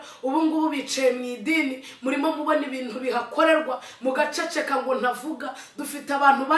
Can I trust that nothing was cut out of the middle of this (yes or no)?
yes